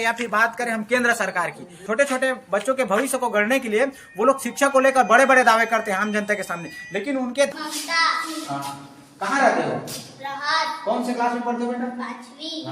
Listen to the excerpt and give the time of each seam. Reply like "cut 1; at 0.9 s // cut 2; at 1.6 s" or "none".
cut 1; at 7.5 s